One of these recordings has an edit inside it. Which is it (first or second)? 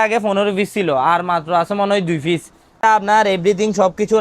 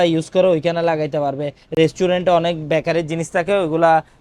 first